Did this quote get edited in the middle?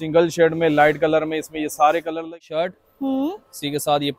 yes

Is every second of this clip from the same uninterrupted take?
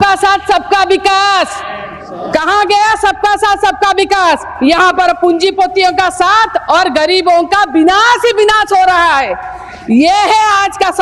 yes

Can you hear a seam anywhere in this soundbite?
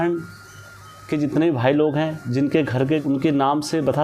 yes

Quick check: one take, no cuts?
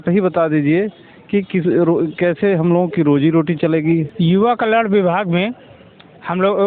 no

